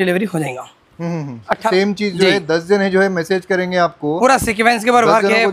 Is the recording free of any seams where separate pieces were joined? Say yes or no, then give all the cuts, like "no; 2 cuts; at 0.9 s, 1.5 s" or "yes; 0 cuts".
no; 1 cut; at 1.7 s